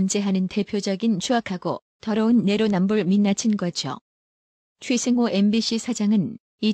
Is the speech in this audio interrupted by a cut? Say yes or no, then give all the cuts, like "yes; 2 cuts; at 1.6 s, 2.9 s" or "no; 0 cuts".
no; 0 cuts